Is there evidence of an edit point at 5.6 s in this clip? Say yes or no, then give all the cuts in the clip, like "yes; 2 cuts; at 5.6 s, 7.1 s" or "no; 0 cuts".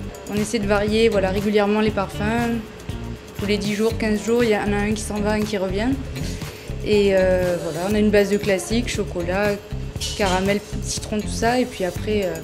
no; 1 cut; at 7.9 s